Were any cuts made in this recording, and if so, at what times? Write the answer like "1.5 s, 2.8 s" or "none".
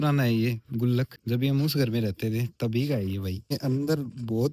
1.2 s, 3.5 s